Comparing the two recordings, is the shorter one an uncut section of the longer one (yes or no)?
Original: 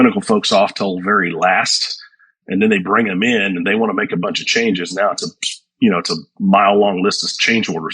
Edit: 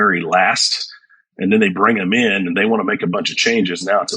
yes